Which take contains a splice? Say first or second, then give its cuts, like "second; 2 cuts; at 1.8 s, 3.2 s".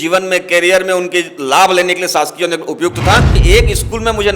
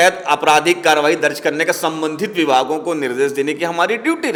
first; 1 cut; at 3.4 s